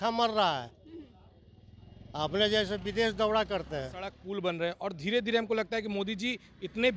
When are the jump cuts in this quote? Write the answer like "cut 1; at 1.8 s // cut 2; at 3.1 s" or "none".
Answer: cut 1; at 4.2 s